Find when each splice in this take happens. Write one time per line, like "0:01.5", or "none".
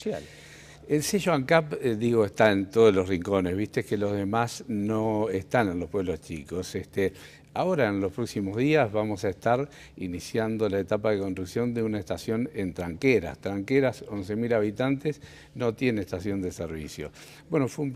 none

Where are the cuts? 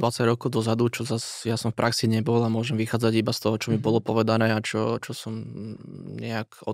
none

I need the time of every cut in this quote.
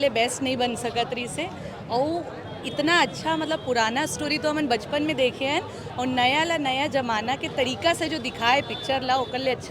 none

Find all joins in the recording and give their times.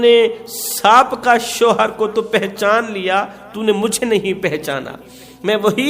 none

